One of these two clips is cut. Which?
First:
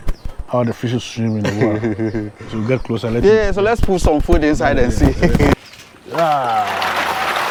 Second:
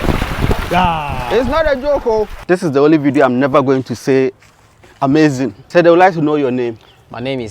second; 2 cuts; at 2.4 s, 5.6 s

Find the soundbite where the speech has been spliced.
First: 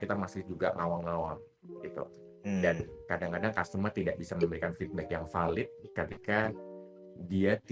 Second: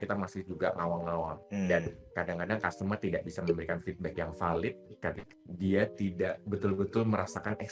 second; 2 cuts; at 1.4 s, 5.2 s

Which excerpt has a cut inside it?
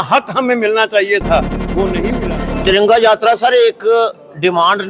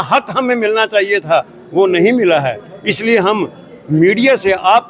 first; 1 cut; at 2.1 s

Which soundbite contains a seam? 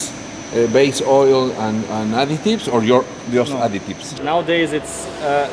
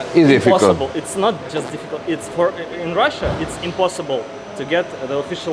first; 1 cut; at 4.0 s

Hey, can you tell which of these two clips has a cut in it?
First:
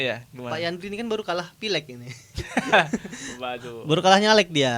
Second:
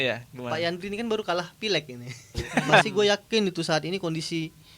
second; 1 cut; at 2.9 s

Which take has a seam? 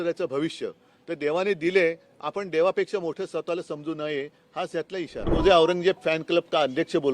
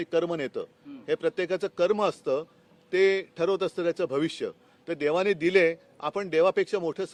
first; 1 cut; at 5.3 s

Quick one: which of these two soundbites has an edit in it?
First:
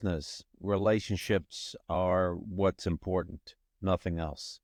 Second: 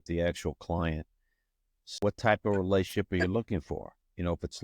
second; 1 cut; at 2.0 s

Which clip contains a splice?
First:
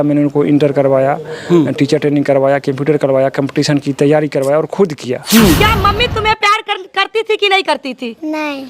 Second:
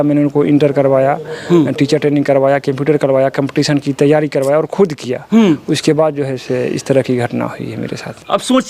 first; 1 cut; at 5.6 s

